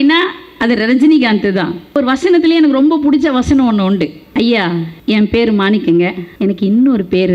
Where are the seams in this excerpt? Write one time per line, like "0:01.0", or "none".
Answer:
0:02.0
0:04.2
0:04.9
0:06.2